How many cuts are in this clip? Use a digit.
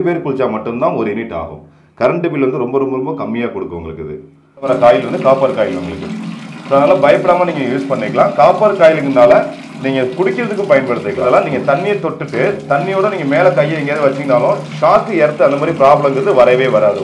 2